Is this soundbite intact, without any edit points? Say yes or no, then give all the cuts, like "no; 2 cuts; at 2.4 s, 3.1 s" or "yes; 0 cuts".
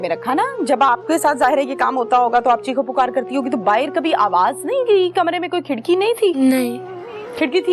yes; 0 cuts